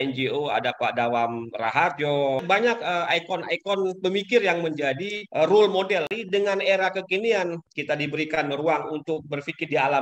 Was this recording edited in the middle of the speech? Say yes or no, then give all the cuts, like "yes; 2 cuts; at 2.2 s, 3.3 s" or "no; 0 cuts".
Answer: yes; 4 cuts; at 2.4 s, 5.2 s, 6.1 s, 7.6 s